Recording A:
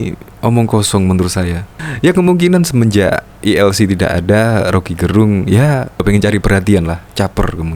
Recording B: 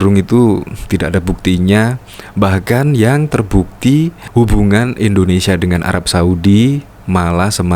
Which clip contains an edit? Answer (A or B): A